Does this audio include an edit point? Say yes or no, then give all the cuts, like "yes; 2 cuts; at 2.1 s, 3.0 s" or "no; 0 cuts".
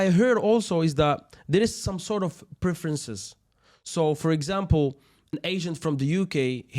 yes; 1 cut; at 5.3 s